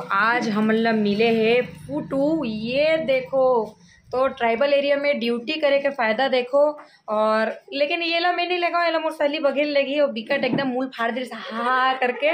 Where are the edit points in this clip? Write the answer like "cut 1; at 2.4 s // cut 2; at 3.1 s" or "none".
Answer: none